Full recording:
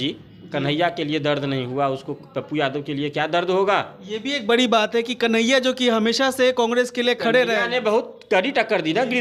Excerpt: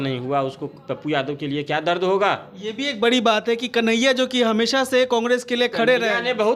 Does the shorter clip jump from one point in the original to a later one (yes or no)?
no